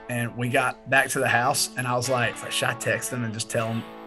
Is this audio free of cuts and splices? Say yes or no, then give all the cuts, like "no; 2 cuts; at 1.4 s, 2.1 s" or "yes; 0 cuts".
no; 1 cut; at 2.4 s